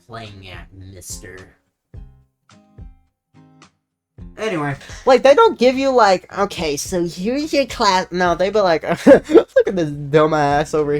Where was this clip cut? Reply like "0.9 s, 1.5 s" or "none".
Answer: 4.8 s